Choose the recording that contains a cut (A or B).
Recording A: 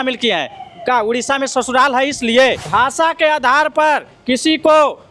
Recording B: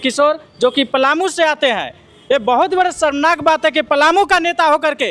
A